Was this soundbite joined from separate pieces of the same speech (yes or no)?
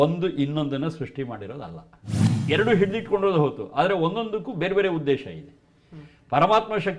yes